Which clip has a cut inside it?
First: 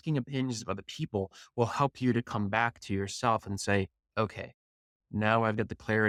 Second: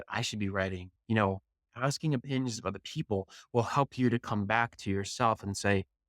second; 1 cut; at 0.9 s

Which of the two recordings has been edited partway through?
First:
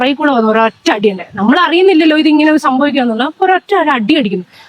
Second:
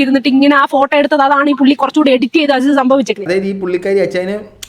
second; 1 cut; at 3.3 s

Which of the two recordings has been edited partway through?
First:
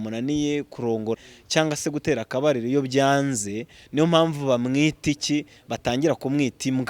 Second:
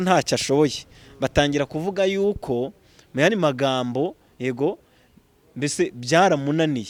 first; 1 cut; at 1.2 s

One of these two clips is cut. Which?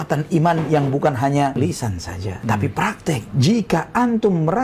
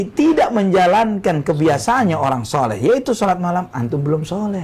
first; 2 cuts; at 1.5 s, 3.3 s

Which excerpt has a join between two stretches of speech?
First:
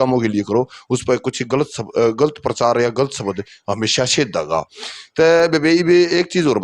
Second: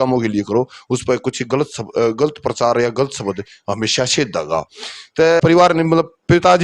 second; 1 cut; at 5.4 s

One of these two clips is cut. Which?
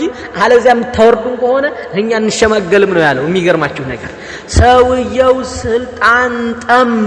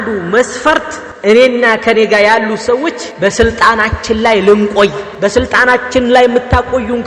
second; 3 cuts; at 1.0 s, 3.0 s, 5.1 s

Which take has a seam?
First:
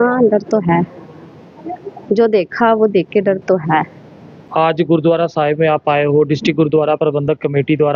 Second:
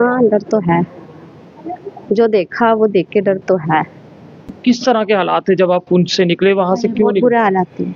second; 1 cut; at 4.5 s

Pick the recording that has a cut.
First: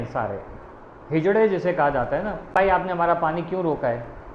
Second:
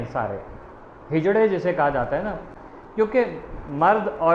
first; 1 cut; at 2.5 s

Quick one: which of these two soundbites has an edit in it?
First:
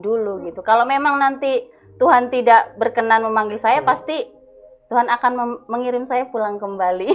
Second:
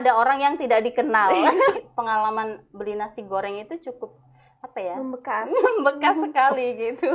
second; 1 cut; at 1.7 s

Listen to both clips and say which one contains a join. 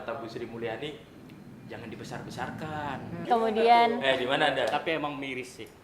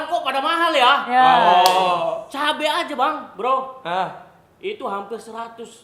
first; 1 cut; at 3.3 s

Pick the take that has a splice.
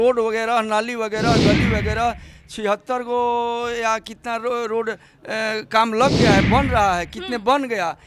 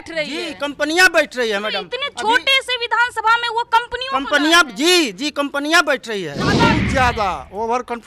second; 1 cut; at 6.5 s

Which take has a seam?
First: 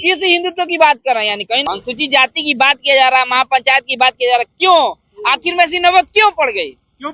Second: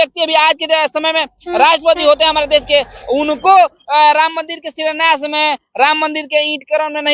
first; 1 cut; at 1.7 s

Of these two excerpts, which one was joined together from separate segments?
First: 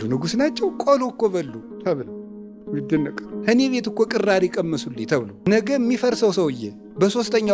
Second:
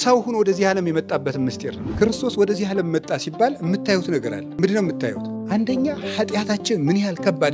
second; 3 cuts; at 1.8 s, 4.4 s, 5.3 s

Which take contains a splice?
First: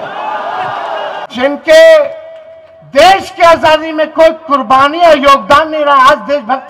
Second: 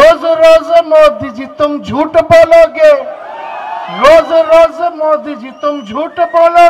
first; 1 cut; at 1.2 s

